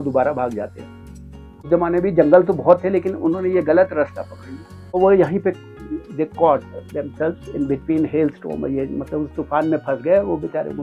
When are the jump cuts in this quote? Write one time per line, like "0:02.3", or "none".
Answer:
0:01.6
0:05.0